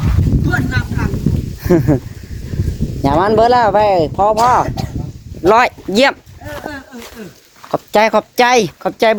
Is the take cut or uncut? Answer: uncut